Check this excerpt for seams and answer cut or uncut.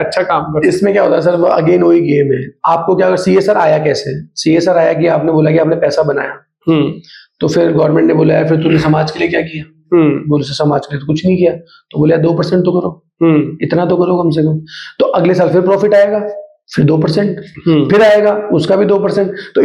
uncut